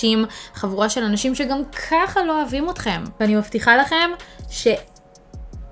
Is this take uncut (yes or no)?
yes